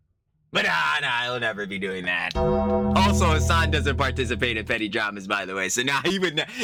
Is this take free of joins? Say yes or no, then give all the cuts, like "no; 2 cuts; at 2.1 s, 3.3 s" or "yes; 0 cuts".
yes; 0 cuts